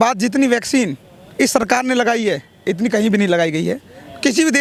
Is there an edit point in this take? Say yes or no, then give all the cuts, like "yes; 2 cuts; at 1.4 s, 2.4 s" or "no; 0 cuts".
no; 0 cuts